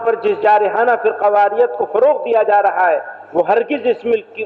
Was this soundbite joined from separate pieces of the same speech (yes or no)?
no